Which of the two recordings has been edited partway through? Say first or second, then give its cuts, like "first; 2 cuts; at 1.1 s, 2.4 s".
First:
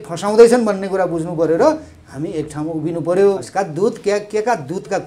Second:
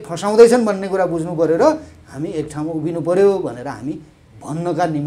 first; 1 cut; at 3.5 s